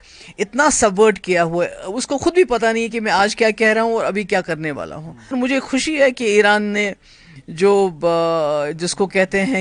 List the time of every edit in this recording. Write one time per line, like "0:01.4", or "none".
0:05.3